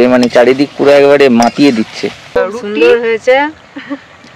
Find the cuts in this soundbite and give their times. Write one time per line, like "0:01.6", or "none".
0:02.4

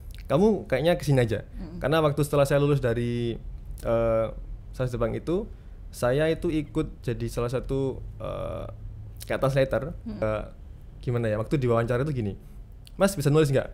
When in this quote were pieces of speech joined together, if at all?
0:10.2

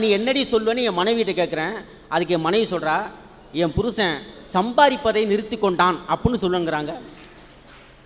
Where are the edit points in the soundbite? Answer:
none

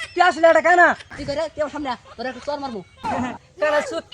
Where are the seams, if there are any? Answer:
0:01.1
0:03.1

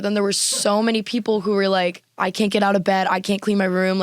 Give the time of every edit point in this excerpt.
0:02.1

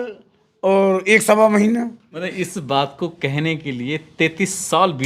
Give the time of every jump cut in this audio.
0:02.2

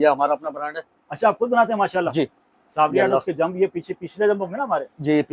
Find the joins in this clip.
none

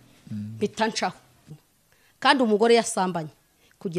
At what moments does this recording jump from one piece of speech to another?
0:01.5

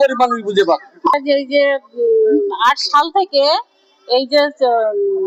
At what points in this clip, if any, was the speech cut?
none

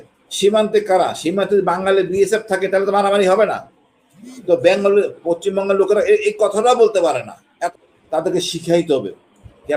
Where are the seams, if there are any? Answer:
0:07.7

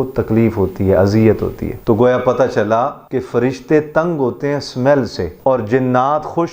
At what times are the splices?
0:01.7
0:03.0
0:05.2

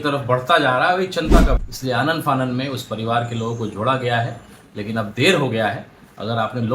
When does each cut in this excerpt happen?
0:01.6

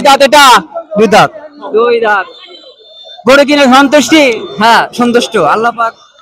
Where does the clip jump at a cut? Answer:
none

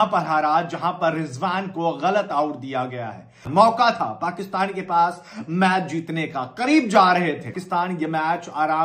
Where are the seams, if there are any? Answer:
0:03.5
0:07.5

